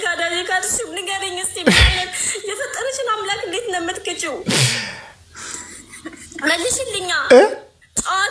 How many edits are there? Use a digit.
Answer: 0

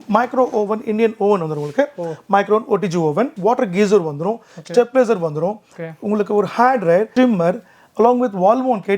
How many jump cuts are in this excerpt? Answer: 2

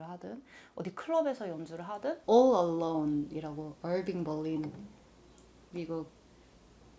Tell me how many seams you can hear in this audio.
1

